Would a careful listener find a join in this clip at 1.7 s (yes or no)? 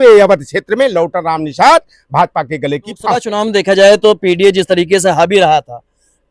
no